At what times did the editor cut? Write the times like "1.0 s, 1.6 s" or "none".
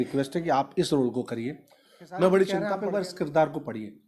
2.7 s